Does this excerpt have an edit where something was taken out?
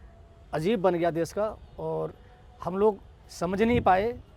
no; 0 cuts

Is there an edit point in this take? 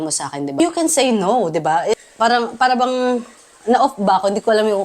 yes; 1 cut; at 2.0 s

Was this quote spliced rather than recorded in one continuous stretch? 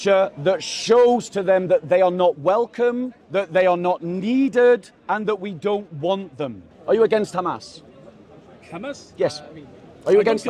yes; 3 cuts; at 3.2 s, 4.9 s, 6.7 s

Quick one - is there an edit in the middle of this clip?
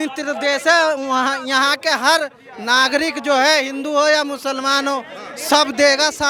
no; 0 cuts

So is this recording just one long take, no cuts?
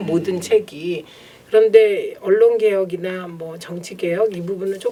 yes; 0 cuts

